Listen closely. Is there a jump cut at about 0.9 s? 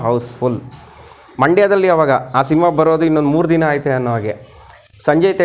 no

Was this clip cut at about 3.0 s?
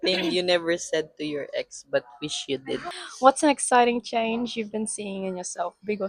yes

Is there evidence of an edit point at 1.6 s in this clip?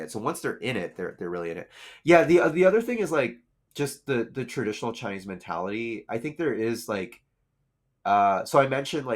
no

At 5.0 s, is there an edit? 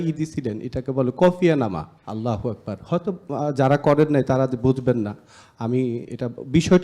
no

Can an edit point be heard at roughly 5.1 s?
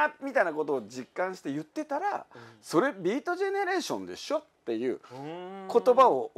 no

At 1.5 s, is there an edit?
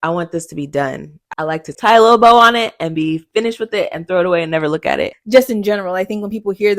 yes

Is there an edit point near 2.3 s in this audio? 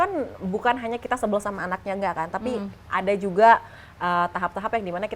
no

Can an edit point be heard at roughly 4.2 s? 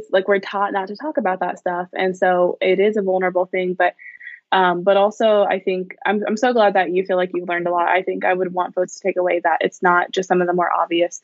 yes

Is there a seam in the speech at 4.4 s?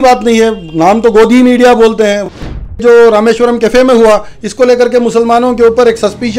no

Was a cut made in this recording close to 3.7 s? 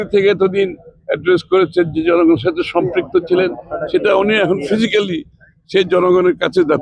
no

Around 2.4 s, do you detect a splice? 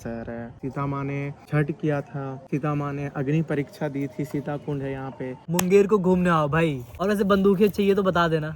yes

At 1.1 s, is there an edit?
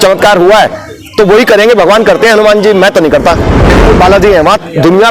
no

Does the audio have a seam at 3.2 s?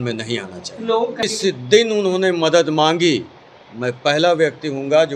no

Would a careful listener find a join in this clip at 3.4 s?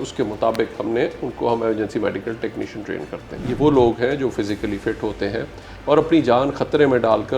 yes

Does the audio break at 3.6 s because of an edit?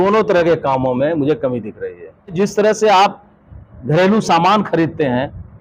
no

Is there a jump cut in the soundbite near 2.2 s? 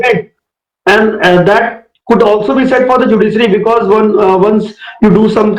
no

